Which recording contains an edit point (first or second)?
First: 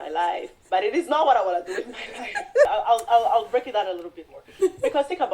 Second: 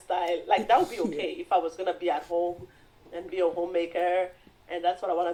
first